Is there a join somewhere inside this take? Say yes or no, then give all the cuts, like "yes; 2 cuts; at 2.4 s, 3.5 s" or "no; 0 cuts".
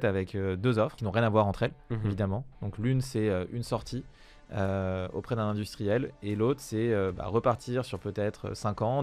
yes; 1 cut; at 1.0 s